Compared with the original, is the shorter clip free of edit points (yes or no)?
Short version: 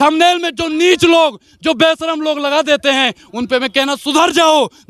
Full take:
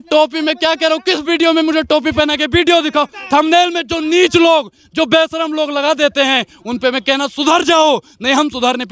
yes